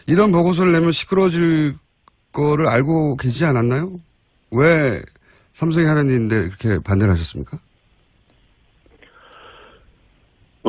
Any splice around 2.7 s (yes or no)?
no